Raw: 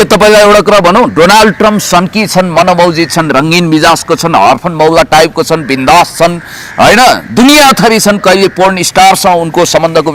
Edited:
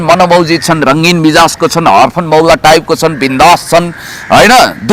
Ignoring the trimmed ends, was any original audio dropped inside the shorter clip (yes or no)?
no